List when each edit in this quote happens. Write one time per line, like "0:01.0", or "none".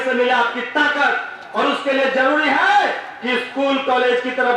none